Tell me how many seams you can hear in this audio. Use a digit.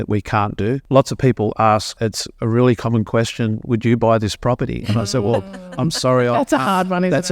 1